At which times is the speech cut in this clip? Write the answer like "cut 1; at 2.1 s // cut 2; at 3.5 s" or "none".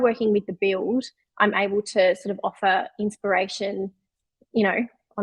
none